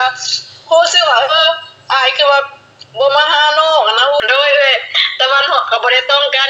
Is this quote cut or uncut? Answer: cut